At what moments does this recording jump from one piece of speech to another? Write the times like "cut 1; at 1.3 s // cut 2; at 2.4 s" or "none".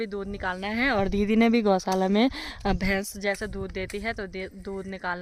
none